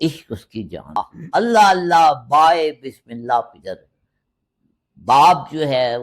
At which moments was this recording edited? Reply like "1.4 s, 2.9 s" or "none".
1.1 s